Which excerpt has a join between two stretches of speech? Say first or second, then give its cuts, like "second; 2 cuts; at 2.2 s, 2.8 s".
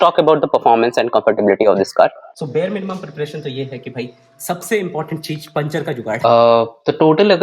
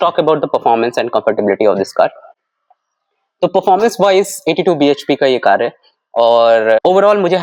first; 2 cuts; at 2.3 s, 6.2 s